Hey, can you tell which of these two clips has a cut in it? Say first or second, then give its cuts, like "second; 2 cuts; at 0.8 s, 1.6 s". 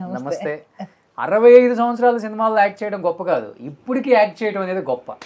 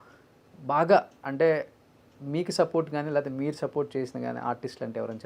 first; 1 cut; at 1.0 s